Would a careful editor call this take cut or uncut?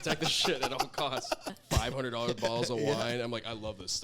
cut